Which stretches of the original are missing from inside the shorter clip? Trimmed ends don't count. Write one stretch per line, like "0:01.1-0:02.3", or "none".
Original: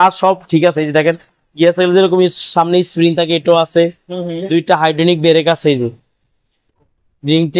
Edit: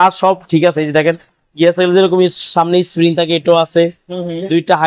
none